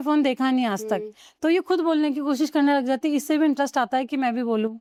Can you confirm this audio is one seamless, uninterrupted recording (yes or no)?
yes